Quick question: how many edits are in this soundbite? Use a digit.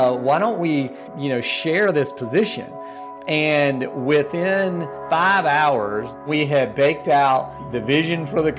4